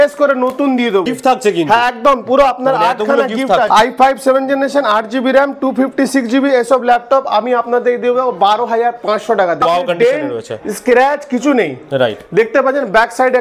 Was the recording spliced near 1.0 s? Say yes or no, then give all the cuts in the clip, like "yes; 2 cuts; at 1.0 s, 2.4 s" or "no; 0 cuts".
yes; 3 cuts; at 1.0 s, 3.7 s, 9.6 s